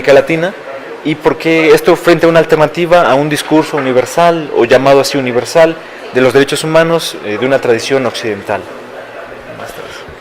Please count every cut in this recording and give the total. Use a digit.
0